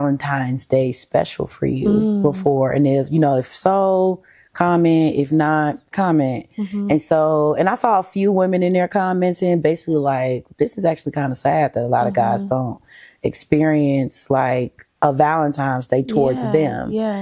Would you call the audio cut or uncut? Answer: uncut